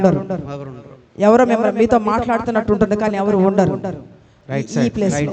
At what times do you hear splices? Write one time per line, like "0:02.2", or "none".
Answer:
0:04.4

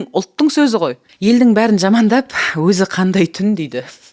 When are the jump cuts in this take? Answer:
0:01.1

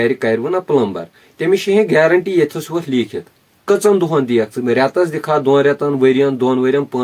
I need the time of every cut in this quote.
none

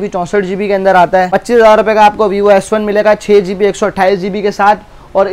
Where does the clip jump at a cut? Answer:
0:01.3

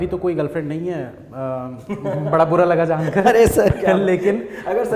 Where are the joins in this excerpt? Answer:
none

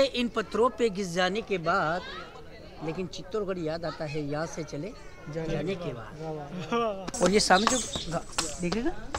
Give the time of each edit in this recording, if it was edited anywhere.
0:07.0

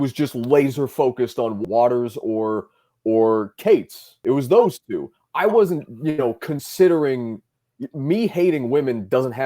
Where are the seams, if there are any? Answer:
0:01.6

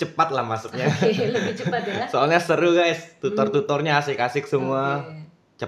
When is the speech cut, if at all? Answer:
none

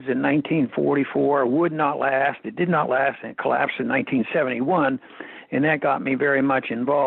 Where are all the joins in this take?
0:01.5

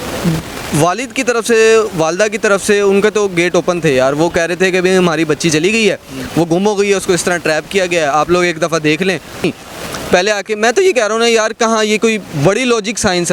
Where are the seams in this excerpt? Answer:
0:09.4

